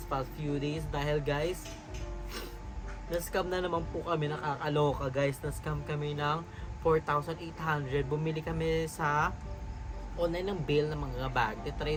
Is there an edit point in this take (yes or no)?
no